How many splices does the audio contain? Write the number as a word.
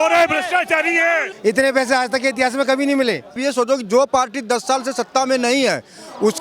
two